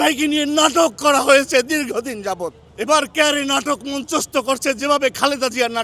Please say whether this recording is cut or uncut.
cut